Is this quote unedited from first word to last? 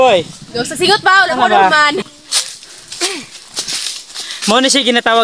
no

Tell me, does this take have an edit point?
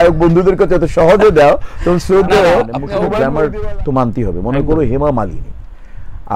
yes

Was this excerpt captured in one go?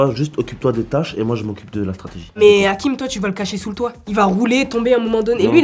no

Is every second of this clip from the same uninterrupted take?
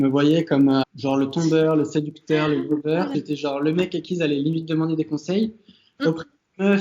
no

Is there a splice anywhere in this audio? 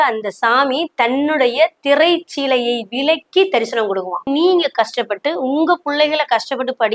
yes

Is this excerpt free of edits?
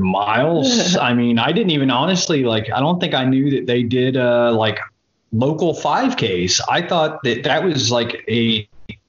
yes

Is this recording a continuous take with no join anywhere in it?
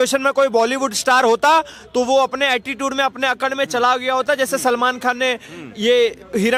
yes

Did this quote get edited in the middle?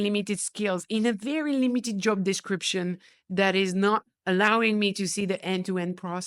no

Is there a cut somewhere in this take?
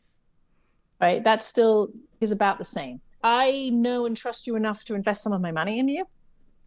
yes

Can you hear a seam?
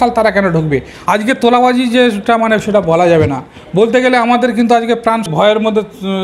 yes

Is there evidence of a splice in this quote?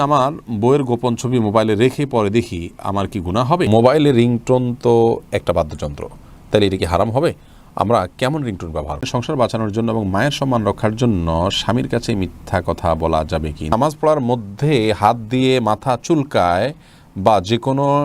yes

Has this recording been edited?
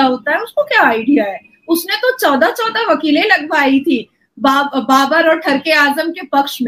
no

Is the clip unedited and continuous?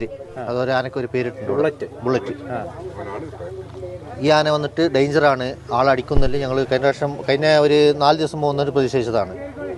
yes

